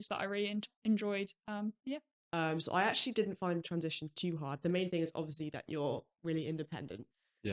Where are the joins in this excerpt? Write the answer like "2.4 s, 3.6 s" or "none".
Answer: 2.1 s